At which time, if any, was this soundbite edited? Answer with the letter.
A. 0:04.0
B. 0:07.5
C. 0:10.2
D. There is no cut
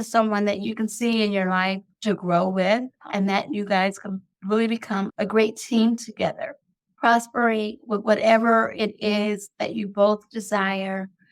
D